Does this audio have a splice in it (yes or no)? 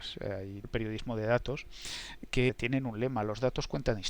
no